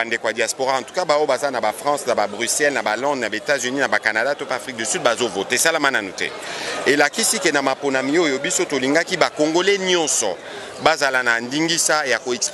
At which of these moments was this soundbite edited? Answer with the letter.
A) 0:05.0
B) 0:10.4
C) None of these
C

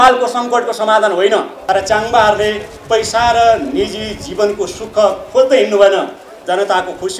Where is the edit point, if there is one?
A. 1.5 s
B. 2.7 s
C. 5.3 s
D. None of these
A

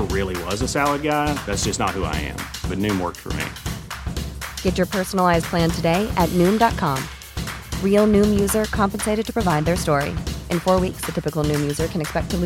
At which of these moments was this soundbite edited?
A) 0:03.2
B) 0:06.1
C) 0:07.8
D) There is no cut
D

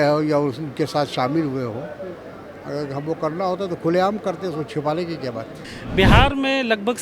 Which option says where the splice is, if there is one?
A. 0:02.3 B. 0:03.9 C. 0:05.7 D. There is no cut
C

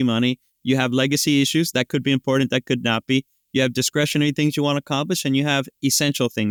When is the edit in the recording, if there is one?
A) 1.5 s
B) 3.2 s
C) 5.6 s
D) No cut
D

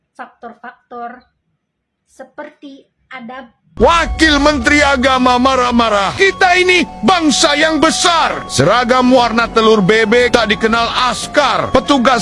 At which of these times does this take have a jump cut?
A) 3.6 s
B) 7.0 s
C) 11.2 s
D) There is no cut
A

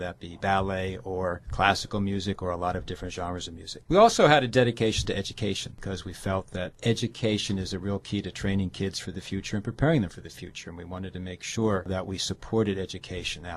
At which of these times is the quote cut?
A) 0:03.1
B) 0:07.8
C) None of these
A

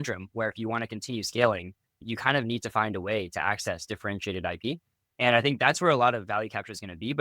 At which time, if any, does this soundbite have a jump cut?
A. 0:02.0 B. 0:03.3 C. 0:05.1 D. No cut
A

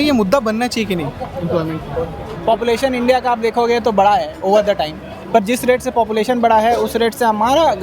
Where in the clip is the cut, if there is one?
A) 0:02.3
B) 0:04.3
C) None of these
A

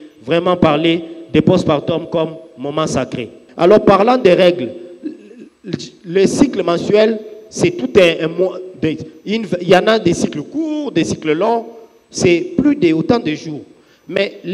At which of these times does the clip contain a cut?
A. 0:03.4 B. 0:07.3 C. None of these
A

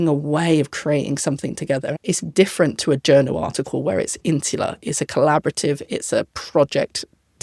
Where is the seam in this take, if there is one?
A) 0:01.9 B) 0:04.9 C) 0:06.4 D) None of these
A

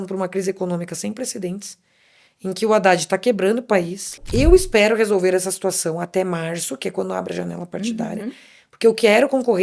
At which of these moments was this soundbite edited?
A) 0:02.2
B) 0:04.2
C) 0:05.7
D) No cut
B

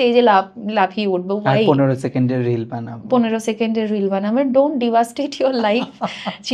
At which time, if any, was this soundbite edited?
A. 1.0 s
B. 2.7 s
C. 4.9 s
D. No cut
D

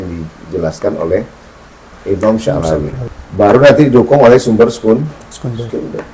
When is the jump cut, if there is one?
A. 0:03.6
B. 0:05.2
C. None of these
A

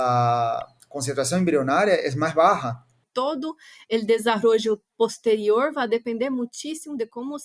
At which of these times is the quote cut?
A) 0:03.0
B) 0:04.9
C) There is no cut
A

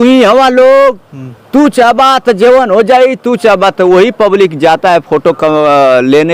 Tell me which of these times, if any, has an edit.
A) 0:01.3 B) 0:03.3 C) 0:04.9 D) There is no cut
D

